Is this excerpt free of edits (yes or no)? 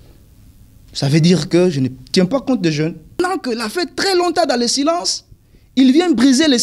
no